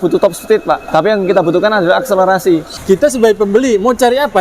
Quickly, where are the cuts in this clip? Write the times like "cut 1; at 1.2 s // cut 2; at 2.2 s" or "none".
cut 1; at 0.8 s // cut 2; at 2.7 s